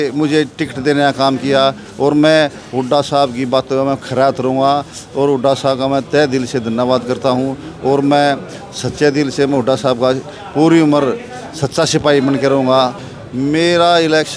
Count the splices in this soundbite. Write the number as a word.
one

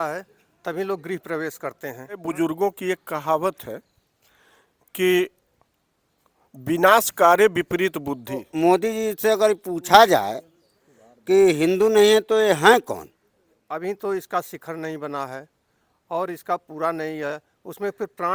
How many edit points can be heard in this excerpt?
three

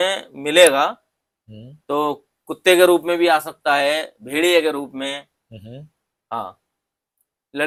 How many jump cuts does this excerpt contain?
zero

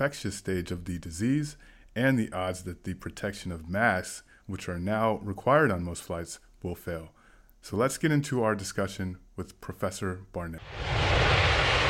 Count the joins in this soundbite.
one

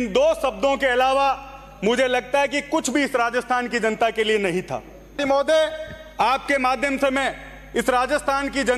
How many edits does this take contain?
one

